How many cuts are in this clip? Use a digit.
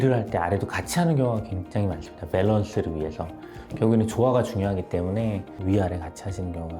0